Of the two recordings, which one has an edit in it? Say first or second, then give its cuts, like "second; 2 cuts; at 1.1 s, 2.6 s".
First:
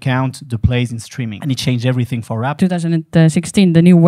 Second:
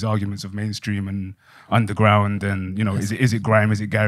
first; 2 cuts; at 1.4 s, 2.5 s